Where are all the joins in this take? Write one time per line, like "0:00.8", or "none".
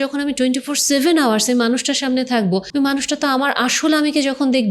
0:02.7

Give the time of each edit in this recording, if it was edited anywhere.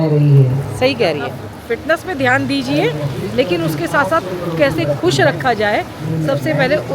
0:01.5

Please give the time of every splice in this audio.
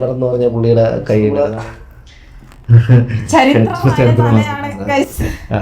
0:01.4

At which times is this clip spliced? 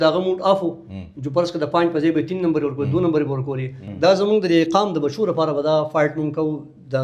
0:03.8

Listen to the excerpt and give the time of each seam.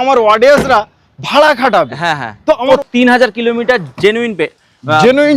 0:02.6

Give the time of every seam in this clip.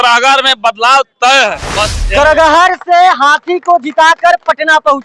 0:01.7

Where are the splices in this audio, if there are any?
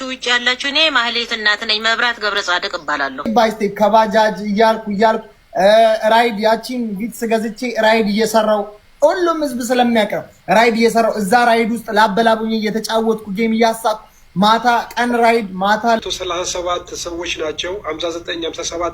0:03.3
0:16.0

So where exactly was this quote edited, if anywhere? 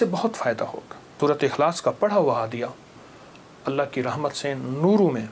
0:01.2

